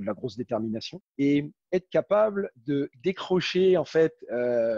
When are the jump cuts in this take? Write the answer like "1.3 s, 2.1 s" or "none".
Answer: 1.0 s